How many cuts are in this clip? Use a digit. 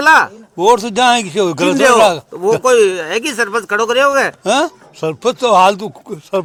0